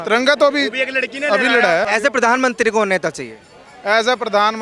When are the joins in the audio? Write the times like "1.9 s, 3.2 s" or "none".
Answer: 1.9 s